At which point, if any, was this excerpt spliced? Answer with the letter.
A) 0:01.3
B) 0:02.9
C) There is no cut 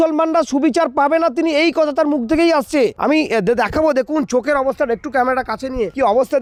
C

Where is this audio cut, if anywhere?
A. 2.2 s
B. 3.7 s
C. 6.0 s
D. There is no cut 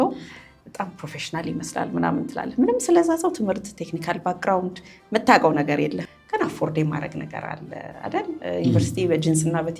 C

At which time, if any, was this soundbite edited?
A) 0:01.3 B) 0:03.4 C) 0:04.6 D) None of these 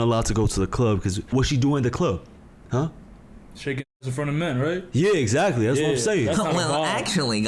A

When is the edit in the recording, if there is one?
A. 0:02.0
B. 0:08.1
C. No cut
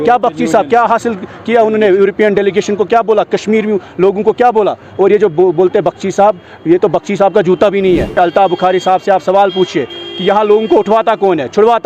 B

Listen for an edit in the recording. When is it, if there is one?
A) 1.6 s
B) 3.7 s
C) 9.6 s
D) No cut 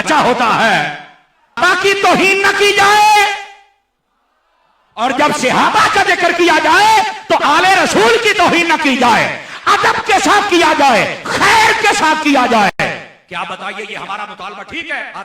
A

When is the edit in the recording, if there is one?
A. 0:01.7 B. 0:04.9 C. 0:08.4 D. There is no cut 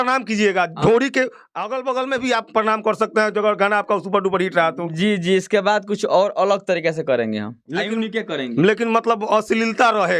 D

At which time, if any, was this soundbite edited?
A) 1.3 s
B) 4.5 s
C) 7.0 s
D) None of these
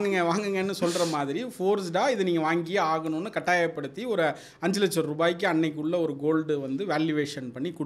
D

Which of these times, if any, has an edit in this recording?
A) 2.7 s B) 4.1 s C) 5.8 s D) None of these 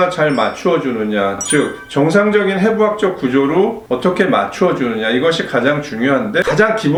D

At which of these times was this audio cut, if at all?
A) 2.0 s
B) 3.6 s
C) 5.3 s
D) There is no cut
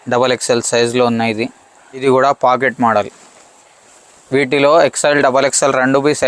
A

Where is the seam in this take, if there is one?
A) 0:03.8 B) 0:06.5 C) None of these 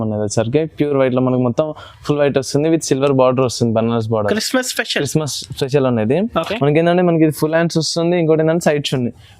B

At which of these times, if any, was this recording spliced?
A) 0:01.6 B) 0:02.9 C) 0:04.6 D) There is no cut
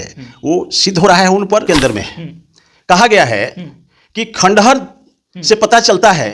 A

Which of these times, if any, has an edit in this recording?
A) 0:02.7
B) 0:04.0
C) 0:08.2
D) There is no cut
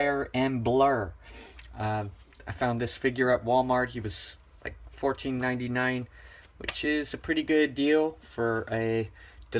D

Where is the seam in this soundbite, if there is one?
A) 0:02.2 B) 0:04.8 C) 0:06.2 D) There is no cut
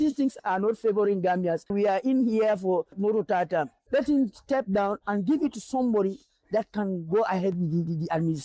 D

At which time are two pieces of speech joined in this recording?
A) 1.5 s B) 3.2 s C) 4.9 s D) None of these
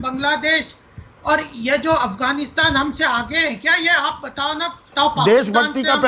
C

